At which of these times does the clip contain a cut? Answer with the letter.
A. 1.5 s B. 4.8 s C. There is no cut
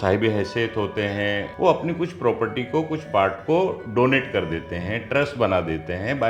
A